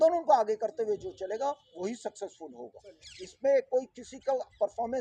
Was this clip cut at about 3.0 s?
yes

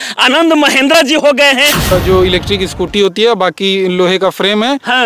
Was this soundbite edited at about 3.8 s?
no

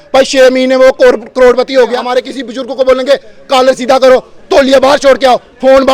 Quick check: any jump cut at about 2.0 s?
yes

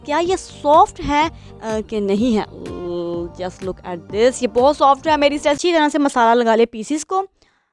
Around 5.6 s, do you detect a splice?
yes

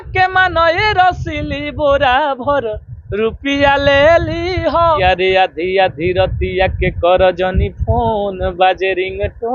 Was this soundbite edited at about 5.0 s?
yes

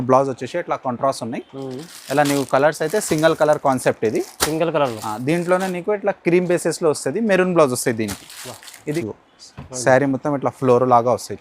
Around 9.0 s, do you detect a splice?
yes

